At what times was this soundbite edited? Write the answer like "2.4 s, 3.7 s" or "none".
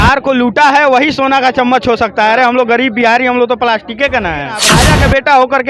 4.8 s